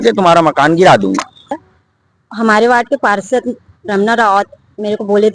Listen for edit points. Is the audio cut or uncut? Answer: cut